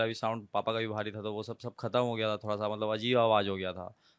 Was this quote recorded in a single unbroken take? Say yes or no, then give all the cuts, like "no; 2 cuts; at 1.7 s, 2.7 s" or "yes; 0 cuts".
yes; 0 cuts